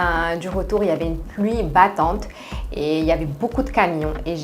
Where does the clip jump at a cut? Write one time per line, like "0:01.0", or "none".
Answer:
none